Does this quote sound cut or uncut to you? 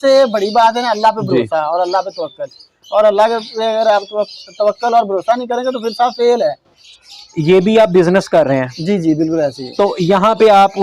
cut